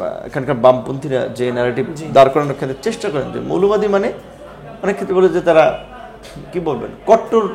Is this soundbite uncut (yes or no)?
yes